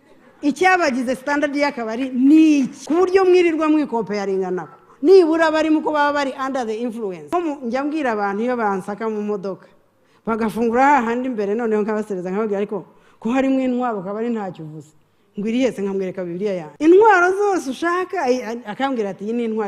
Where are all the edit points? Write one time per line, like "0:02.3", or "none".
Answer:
0:02.8
0:07.2
0:16.7